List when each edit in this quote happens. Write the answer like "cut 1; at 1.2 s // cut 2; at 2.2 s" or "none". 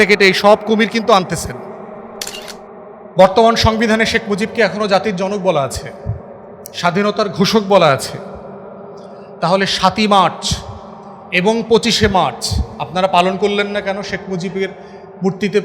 cut 1; at 3.1 s